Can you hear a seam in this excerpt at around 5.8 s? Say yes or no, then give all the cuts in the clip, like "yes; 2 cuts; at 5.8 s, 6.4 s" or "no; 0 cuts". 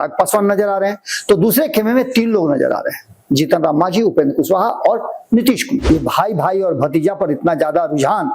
yes; 1 cut; at 5.8 s